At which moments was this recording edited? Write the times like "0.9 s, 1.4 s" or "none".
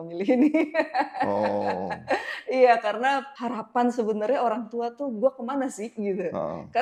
none